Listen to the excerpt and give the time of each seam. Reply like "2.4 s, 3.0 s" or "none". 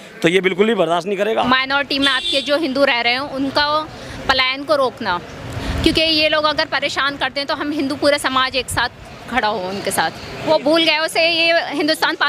1.4 s, 10.5 s